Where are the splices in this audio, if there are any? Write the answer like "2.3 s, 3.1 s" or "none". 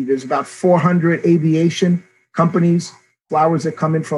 3.2 s